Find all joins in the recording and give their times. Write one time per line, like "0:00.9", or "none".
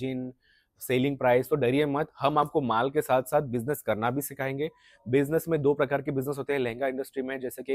none

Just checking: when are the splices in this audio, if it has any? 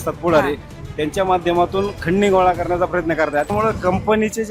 0:03.5

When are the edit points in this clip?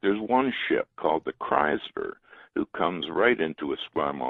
0:00.9

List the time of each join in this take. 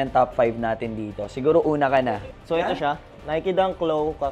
0:02.3

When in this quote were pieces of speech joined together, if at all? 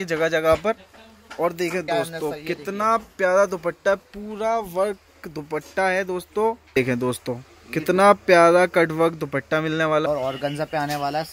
0:01.9
0:06.8
0:10.1

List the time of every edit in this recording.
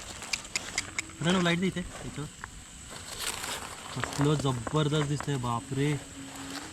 none

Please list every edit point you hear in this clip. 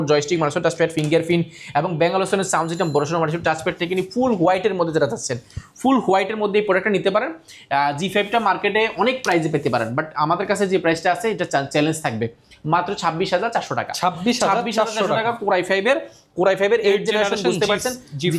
none

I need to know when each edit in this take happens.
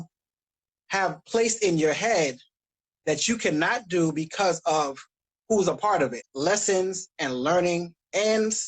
0:06.2

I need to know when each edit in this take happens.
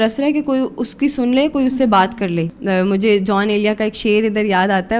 0:02.5

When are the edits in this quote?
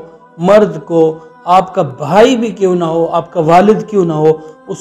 none

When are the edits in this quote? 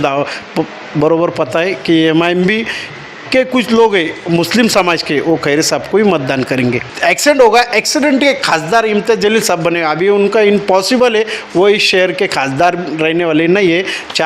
0:06.9

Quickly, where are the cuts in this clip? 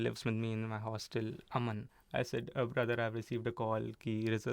0:01.9

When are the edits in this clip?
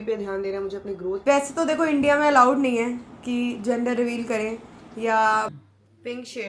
0:01.2
0:05.5

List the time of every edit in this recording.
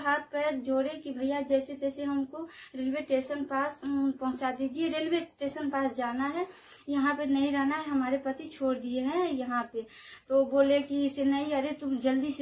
none

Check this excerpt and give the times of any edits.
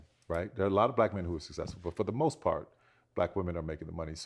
0:01.8

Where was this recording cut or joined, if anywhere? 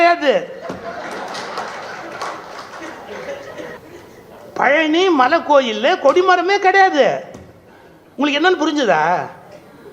0:03.8

